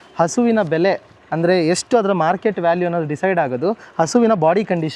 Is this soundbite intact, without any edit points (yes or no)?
yes